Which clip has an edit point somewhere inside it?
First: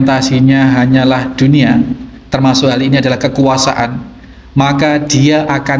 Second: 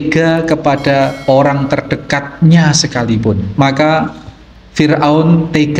second; 1 cut; at 3.5 s

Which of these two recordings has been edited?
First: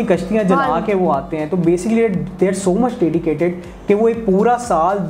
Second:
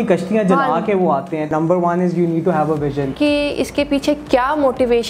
second; 2 cuts; at 1.5 s, 3.1 s

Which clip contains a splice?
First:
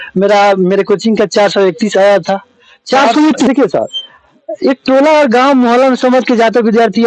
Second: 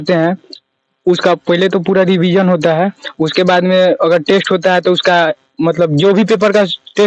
first; 1 cut; at 3.5 s

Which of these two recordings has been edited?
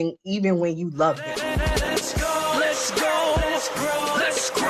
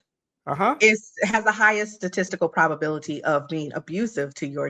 first; 1 cut; at 1.2 s

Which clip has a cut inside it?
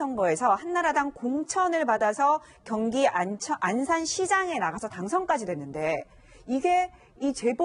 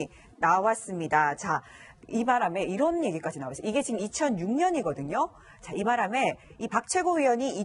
second; 1 cut; at 3.9 s

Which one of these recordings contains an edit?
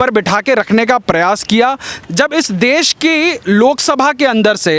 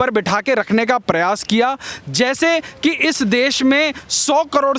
first; 1 cut; at 2.0 s

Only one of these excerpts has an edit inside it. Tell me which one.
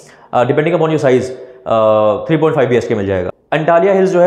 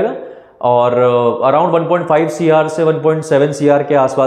first; 1 cut; at 3.3 s

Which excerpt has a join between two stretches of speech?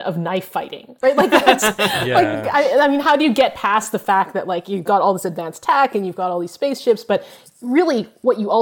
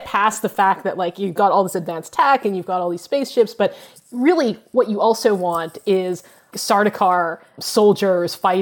second; 2 cuts; at 6.5 s, 7.6 s

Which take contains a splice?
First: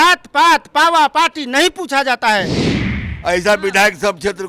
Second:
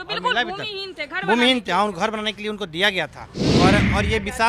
first; 1 cut; at 2.6 s

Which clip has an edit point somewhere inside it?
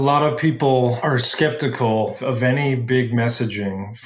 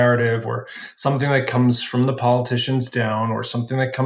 first; 2 cuts; at 1.0 s, 2.2 s

